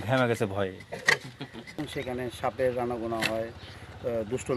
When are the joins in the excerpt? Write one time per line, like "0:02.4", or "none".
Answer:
0:01.8